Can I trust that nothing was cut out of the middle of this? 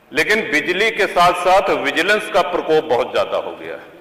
yes; 0 cuts

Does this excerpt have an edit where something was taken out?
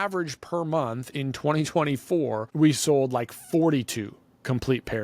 yes; 1 cut; at 2.5 s

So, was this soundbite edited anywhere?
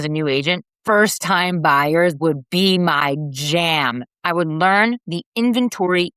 yes; 1 cut; at 4.1 s

